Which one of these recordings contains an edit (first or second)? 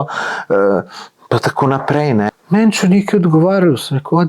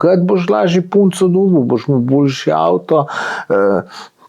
first